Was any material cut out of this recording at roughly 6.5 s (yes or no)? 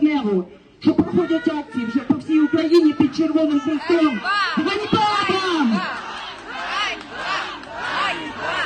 no